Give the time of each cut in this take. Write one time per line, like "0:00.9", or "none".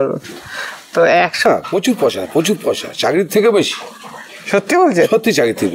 0:01.4